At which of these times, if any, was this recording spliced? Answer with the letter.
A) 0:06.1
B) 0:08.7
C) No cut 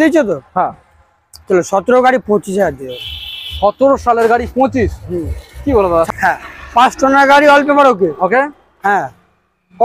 A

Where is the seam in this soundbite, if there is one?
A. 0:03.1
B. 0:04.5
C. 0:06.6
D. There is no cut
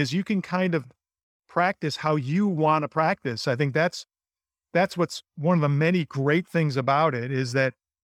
D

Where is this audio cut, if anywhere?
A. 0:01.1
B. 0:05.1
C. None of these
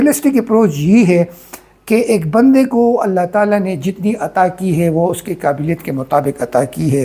C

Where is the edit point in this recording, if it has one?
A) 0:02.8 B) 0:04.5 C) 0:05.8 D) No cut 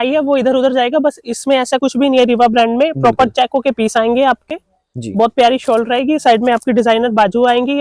D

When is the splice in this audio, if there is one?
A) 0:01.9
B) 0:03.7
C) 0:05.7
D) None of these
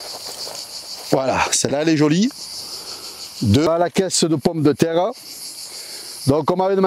B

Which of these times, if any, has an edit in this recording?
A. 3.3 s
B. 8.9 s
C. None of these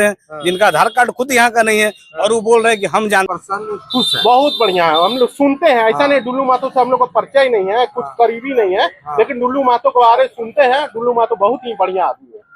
A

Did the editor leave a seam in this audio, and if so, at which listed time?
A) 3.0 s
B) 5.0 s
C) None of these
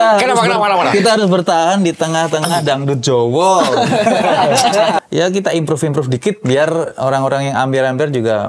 B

